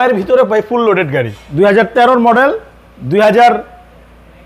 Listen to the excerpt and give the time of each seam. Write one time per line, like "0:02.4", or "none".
0:01.4

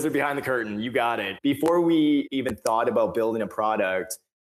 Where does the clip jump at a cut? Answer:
0:01.3
0:02.3

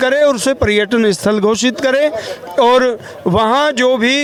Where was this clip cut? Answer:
none

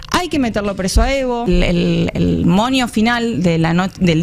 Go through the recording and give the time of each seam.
0:01.4

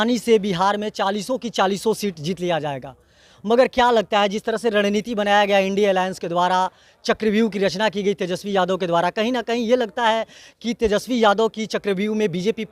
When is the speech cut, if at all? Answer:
none

